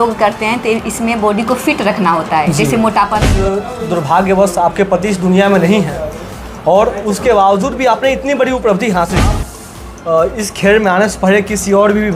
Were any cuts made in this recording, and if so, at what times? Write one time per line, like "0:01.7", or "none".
0:03.3
0:09.5